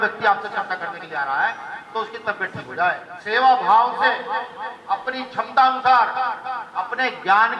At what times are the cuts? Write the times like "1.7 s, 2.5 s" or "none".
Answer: 3.1 s

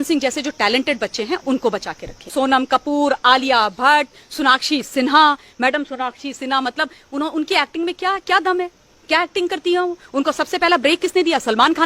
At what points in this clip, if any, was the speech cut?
2.3 s

